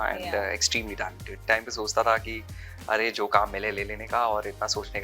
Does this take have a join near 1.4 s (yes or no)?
yes